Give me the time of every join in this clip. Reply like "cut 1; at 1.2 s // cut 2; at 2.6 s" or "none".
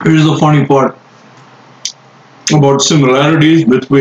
none